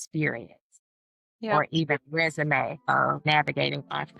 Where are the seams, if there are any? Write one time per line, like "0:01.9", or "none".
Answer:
0:02.8